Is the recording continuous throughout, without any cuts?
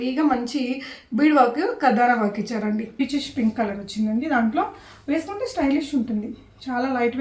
no; 1 cut; at 3.0 s

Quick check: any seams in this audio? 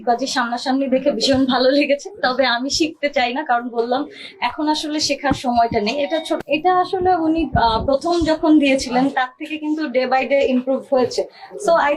yes; 1 cut; at 6.4 s

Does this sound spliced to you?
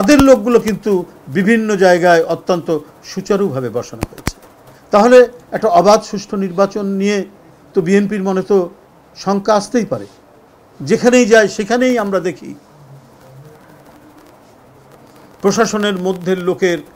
no; 0 cuts

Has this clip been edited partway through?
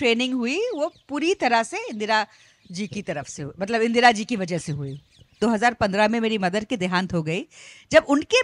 yes; 1 cut; at 5.3 s

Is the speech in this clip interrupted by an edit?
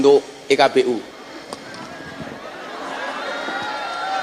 yes; 1 cut; at 1.1 s

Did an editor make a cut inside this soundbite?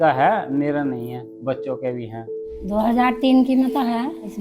yes; 1 cut; at 2.1 s

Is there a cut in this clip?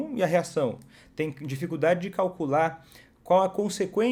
no; 0 cuts

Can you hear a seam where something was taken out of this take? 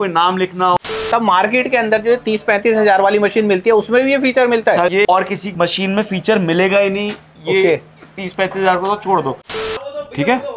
yes; 2 cuts; at 0.8 s, 9.5 s

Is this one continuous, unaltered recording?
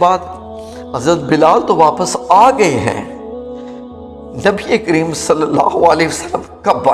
yes; 0 cuts

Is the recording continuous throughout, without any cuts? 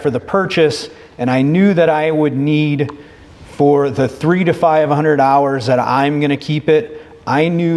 yes; 0 cuts

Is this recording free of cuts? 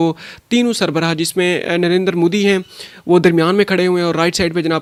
yes; 0 cuts

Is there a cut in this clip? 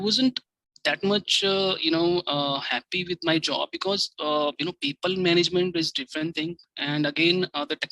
no; 0 cuts

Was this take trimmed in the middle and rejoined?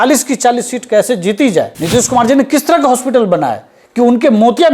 yes; 1 cut; at 1.7 s

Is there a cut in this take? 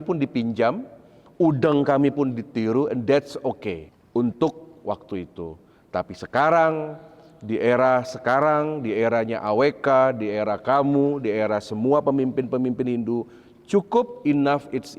yes; 1 cut; at 3.9 s

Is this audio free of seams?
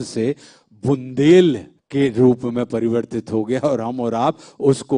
no; 1 cut; at 1.7 s

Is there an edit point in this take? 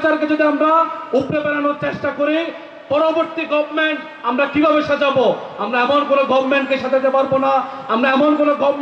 no; 0 cuts

